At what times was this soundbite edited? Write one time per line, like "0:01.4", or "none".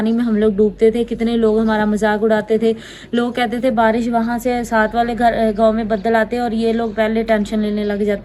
none